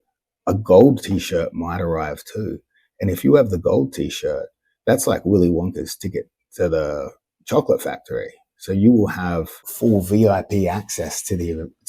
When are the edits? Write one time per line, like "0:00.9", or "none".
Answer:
0:09.6